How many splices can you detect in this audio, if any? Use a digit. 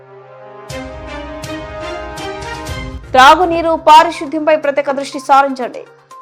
1